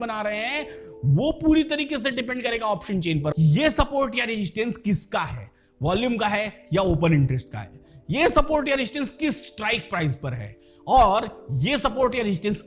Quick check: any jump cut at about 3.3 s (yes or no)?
yes